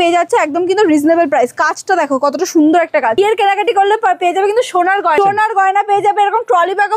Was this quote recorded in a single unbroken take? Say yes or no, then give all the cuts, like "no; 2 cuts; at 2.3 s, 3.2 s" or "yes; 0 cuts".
no; 2 cuts; at 3.2 s, 5.2 s